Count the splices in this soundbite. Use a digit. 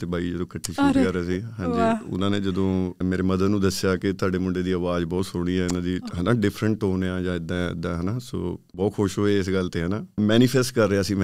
3